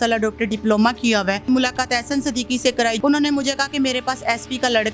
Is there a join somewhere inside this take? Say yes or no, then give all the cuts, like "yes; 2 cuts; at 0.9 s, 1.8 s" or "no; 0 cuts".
yes; 2 cuts; at 1.5 s, 3.0 s